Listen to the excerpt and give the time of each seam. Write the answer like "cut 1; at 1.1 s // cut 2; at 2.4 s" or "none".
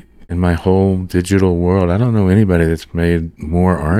none

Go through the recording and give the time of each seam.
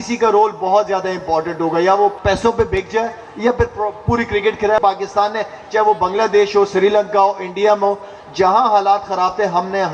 cut 1; at 2.2 s // cut 2; at 4.8 s

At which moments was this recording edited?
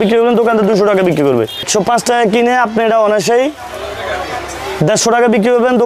cut 1; at 1.7 s

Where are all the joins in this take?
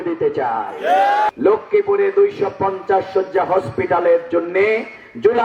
cut 1; at 1.3 s

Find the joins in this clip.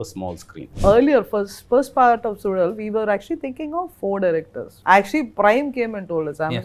cut 1; at 0.8 s // cut 2; at 4.8 s

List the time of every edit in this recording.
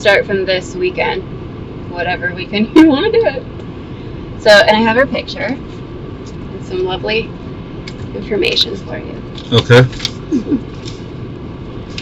none

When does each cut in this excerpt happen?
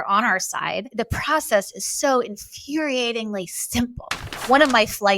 cut 1; at 0.9 s // cut 2; at 4.3 s

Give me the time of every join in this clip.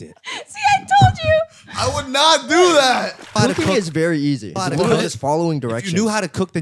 cut 1; at 3.4 s // cut 2; at 4.5 s

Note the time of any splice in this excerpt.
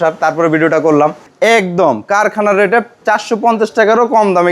cut 1; at 1.3 s // cut 2; at 2.9 s

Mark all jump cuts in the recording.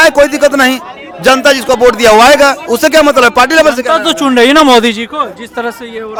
none

